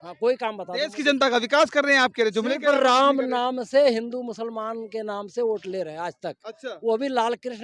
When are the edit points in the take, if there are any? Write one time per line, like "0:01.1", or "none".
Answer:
none

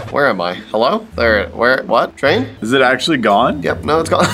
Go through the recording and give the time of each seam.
0:02.5

